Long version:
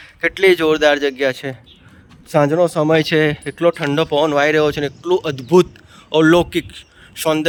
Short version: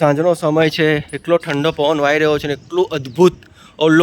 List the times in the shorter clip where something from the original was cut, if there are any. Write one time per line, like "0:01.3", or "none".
none

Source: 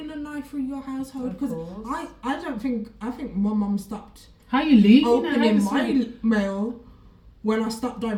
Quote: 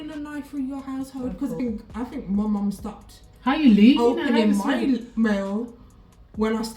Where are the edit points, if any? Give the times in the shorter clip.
0:01.6

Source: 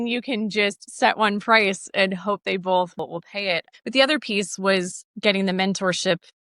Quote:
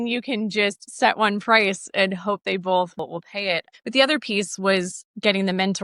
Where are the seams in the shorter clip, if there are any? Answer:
none

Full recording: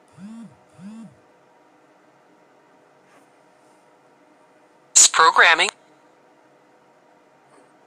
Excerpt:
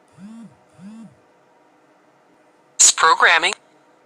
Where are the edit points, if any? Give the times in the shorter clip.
0:02.3

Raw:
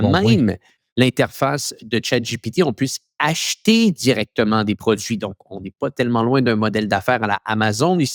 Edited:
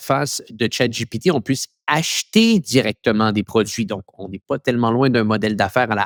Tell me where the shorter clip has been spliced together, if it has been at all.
none

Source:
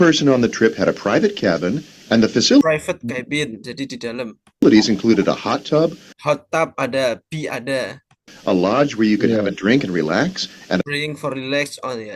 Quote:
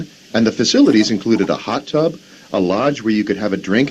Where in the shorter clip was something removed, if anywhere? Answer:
0:00.9
0:02.3

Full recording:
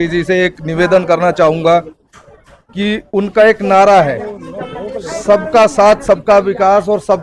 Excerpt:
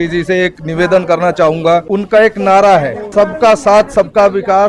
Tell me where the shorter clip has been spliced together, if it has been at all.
0:01.8
0:03.0

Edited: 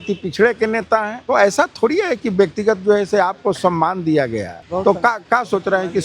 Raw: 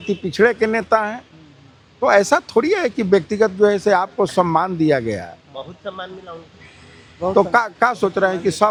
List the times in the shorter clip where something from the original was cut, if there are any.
0:01.1
0:04.6

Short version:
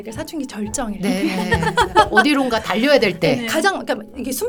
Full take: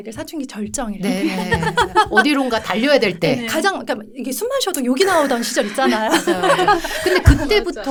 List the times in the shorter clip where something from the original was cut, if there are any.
none

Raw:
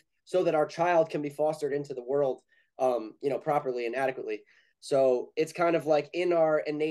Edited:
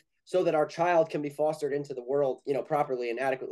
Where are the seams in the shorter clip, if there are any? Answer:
0:02.4

